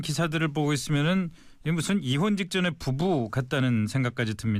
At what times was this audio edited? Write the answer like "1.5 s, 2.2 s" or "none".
none